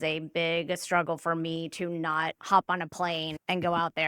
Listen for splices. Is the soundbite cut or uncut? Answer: cut